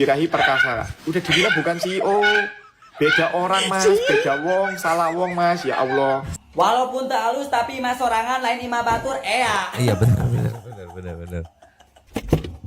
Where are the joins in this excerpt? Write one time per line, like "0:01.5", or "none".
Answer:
0:06.3